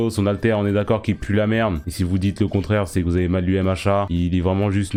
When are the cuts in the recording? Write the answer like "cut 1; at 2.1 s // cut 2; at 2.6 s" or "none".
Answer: none